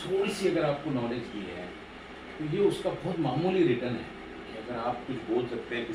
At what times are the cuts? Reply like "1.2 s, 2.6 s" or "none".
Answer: none